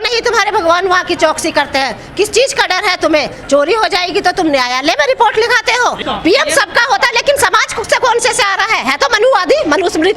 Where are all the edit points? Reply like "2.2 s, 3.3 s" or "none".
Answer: 6.0 s

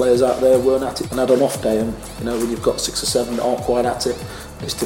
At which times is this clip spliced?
1.0 s

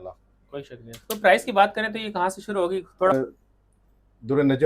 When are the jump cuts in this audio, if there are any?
3.1 s

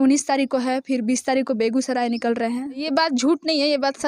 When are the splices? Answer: 2.8 s

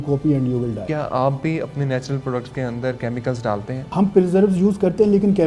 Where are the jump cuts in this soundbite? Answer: 0.8 s, 3.8 s

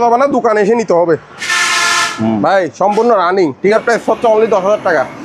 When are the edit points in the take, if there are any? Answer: 1.5 s, 3.8 s

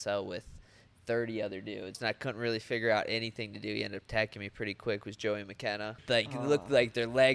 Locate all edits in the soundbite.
2.0 s, 5.9 s

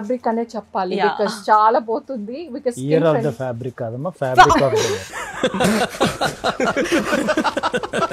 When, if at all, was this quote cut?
none

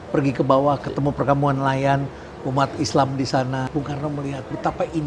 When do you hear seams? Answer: 3.7 s

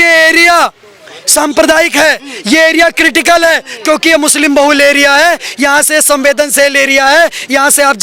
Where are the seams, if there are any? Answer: none

